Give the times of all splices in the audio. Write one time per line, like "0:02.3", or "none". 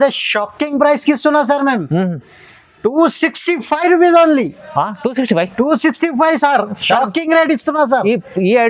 none